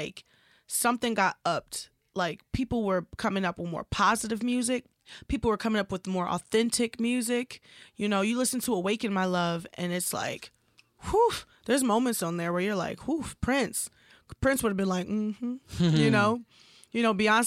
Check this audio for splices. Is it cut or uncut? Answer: uncut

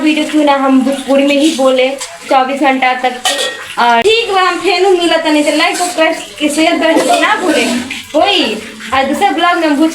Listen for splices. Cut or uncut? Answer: cut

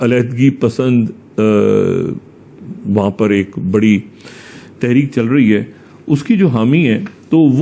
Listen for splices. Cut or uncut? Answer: uncut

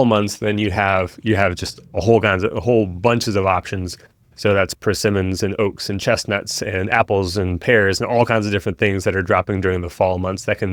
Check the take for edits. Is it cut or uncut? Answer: uncut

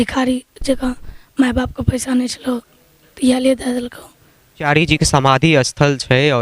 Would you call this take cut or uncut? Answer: cut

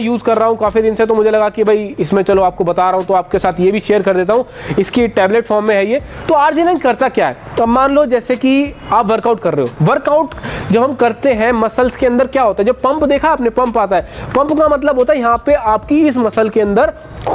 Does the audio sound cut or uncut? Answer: uncut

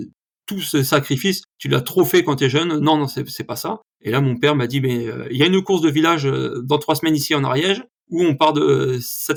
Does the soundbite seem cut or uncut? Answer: uncut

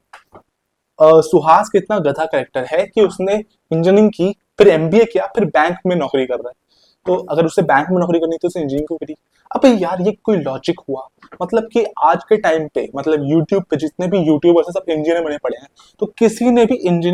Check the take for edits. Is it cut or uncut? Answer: uncut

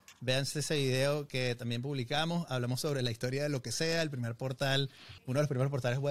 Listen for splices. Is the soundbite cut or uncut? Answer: cut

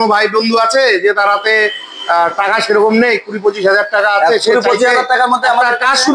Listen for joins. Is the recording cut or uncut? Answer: uncut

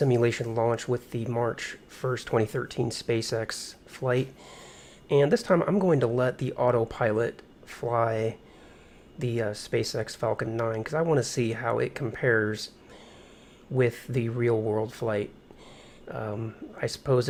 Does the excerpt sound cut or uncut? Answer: uncut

